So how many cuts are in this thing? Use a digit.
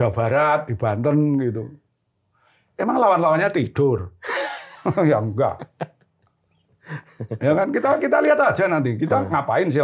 0